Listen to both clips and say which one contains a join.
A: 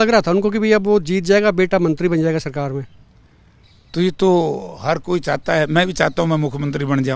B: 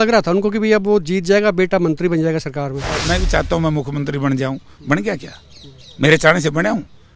B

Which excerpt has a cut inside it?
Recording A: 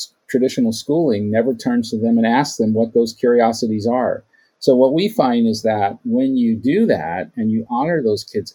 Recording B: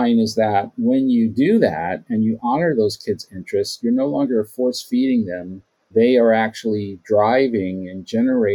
B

